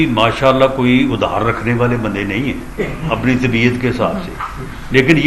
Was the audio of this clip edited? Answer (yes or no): no